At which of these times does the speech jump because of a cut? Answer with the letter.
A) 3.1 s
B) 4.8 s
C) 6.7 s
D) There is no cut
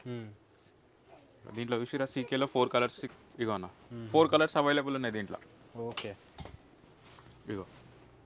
A